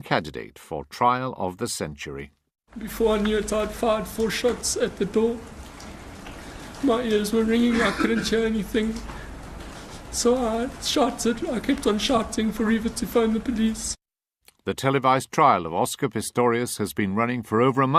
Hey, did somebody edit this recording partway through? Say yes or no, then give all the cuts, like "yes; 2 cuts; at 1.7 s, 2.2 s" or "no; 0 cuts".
no; 0 cuts